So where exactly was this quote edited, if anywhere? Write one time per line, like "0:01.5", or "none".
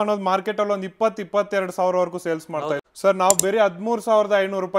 0:02.8